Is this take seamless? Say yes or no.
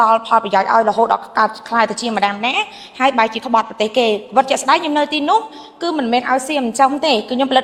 yes